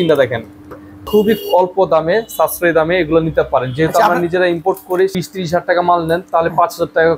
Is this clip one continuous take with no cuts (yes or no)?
no